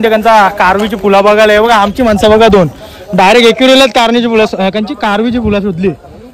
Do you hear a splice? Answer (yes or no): no